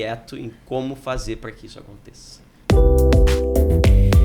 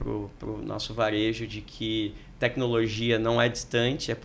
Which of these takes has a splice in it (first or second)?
first